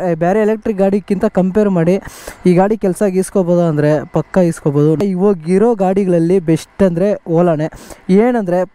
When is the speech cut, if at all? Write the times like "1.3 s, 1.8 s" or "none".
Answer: none

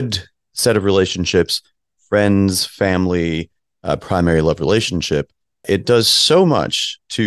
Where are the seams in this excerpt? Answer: none

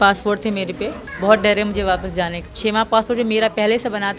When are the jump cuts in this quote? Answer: 1.1 s, 2.4 s

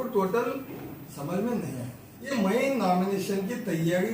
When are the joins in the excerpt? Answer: 2.3 s

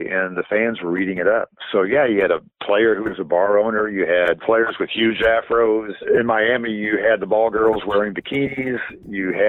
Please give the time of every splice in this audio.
4.4 s, 6.0 s

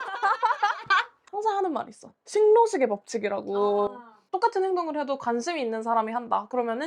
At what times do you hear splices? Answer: 1.2 s

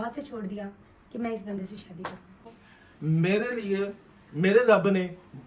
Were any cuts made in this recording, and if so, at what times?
2.5 s

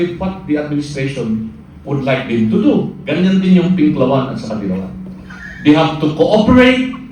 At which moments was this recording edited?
3.0 s

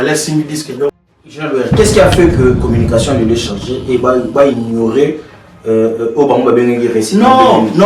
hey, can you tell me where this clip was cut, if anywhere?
1.1 s

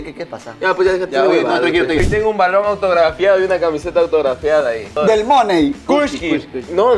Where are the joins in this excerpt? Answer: 2.0 s, 5.0 s, 5.8 s

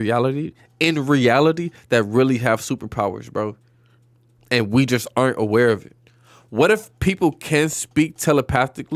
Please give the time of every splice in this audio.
none

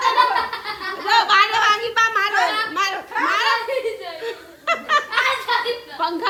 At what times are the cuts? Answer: none

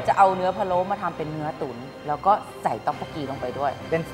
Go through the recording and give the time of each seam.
none

